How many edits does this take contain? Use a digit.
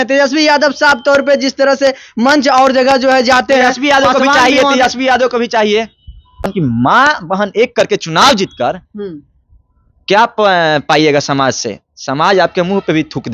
1